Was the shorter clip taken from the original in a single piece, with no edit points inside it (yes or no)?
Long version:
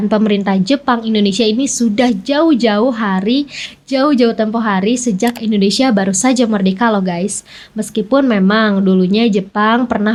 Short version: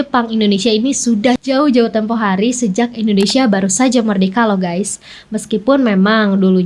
no